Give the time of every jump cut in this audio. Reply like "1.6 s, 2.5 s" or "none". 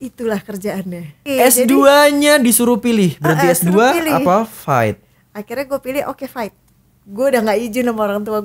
1.2 s